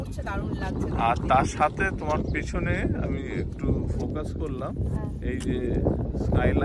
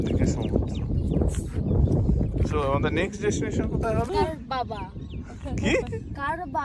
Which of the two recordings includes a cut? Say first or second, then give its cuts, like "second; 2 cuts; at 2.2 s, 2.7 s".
second; 1 cut; at 4.1 s